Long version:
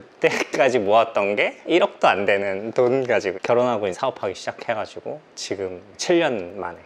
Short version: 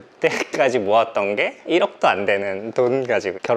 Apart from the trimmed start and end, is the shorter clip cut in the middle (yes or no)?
no